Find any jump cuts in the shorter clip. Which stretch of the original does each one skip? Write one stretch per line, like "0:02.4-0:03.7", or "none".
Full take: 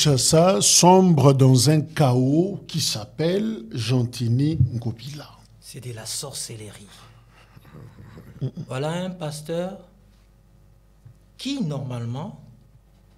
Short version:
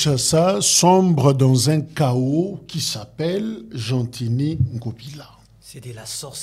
none

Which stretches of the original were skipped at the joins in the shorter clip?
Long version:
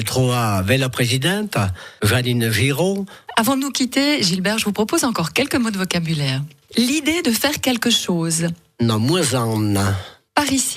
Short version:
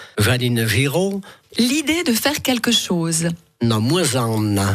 0:03.2-0:06.5

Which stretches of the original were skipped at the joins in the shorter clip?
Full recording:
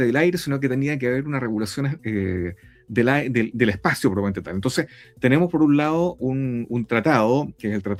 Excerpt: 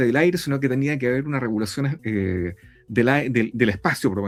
none

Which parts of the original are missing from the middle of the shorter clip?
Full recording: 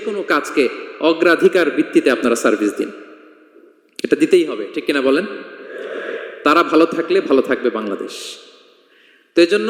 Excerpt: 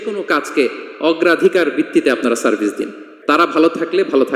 0:03.1-0:06.2

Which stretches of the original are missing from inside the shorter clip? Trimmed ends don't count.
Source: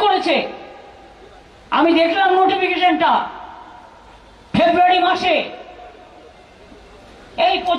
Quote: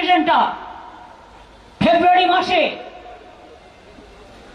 none

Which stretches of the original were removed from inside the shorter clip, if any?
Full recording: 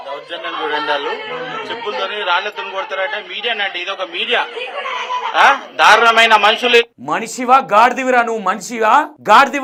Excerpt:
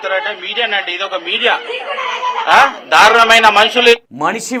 none

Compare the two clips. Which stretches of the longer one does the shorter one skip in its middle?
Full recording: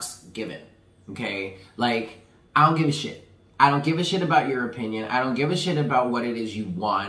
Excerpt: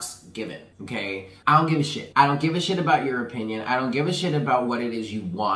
0:01.1-0:02.2
0:03.1-0:03.4

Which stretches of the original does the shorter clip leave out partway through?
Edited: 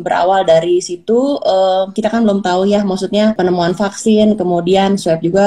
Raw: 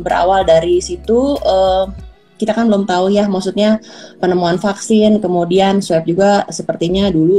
0:01.9-0:02.4
0:03.8-0:04.2

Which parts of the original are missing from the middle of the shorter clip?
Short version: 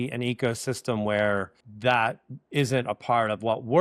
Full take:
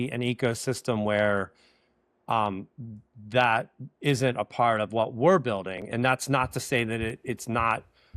0:01.6-0:03.1

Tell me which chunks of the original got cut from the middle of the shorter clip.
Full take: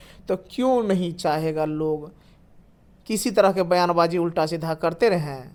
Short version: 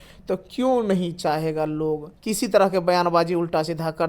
0:02.1-0:03.0

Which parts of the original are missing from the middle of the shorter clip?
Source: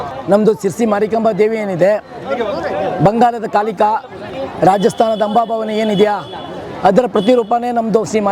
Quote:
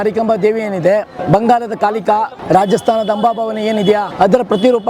0:02.1-0:02.9
0:04.1-0:04.5
0:06.2-0:06.7

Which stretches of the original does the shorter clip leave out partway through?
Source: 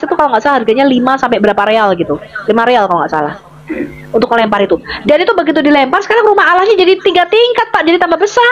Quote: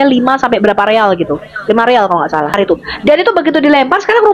0:03.3-0:04.5

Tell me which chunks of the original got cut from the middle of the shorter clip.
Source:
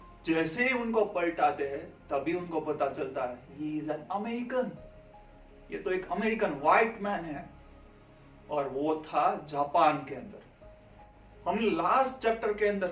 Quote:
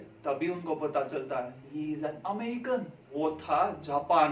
0:05.0-0:08.8

